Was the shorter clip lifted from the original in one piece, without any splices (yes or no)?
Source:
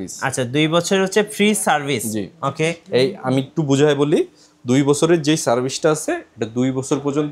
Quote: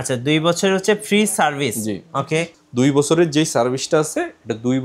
no